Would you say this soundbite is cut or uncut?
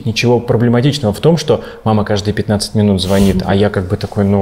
uncut